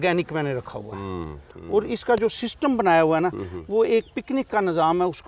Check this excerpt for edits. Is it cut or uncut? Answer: cut